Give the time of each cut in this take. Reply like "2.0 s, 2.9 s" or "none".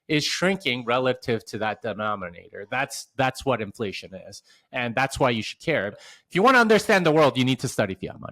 6.0 s